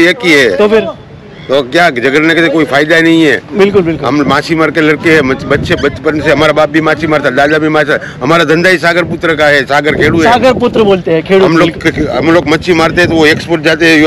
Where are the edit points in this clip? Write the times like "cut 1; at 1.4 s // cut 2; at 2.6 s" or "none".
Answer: none